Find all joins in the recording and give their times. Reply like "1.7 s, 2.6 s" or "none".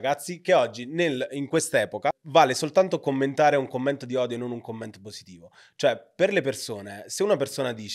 2.2 s